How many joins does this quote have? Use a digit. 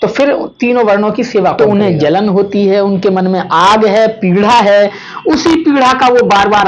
1